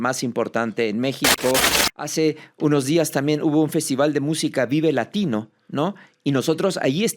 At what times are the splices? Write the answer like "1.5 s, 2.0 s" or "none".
1.8 s